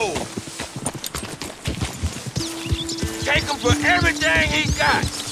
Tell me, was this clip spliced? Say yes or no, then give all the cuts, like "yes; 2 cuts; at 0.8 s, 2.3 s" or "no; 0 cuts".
no; 0 cuts